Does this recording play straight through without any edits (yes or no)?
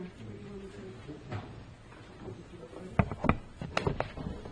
no